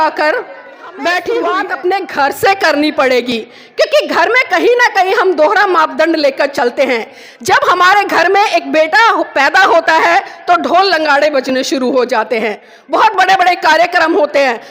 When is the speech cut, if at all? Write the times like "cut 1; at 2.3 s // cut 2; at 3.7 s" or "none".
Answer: cut 1; at 1.6 s